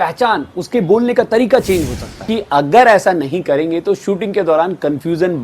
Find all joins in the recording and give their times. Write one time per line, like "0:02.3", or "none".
0:02.2